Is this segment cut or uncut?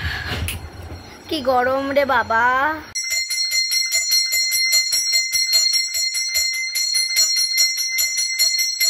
cut